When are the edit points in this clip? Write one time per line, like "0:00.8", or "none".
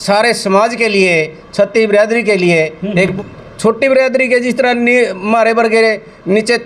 0:03.1